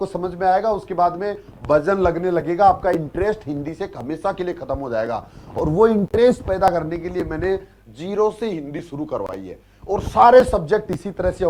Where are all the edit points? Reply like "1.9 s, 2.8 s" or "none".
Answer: none